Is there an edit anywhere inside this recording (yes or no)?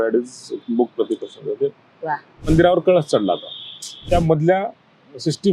yes